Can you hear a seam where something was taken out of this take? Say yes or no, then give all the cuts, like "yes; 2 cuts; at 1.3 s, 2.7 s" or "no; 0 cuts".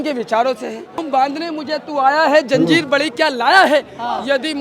yes; 1 cut; at 1.0 s